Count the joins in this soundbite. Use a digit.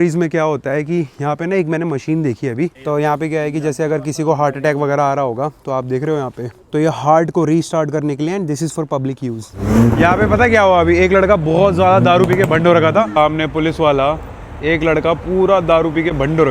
3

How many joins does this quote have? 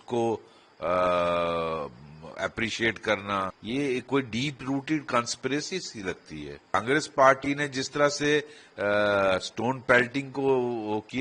2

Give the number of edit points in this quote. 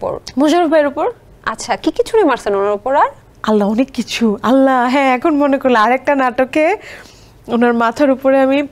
0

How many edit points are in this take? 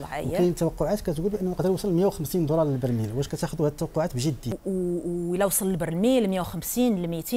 1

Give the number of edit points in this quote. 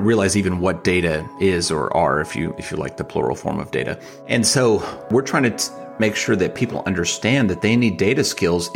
2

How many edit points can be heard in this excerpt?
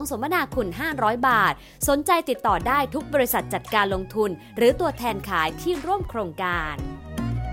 1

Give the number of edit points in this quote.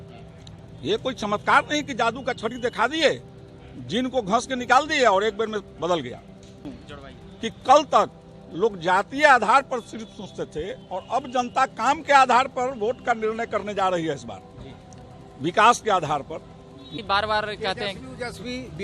2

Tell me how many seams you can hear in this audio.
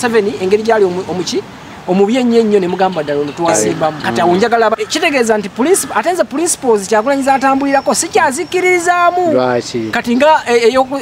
1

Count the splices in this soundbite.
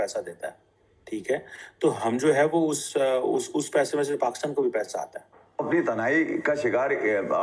1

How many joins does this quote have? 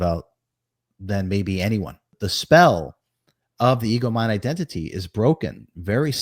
1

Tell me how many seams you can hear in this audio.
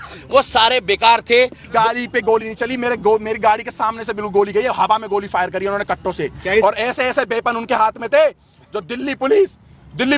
1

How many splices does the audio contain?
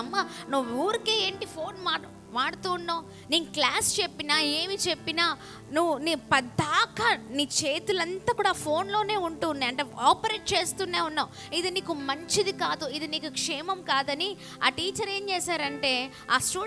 0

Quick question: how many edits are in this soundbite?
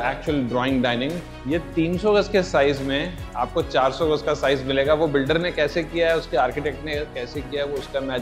1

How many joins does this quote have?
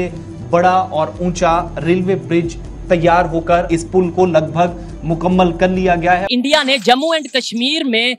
2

